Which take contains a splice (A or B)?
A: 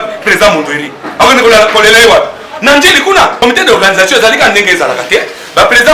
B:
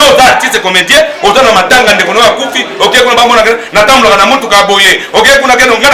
A